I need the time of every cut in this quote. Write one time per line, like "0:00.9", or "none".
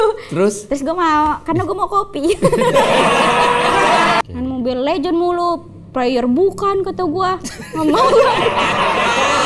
0:04.2